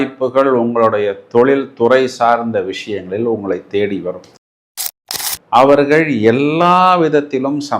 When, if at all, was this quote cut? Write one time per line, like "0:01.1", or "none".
0:04.7